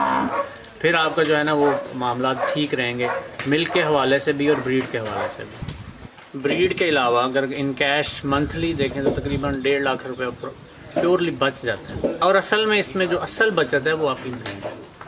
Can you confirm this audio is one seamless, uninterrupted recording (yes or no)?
no